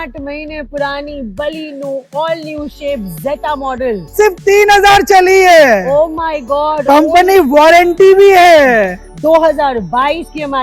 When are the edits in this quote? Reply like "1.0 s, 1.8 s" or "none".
4.1 s, 9.0 s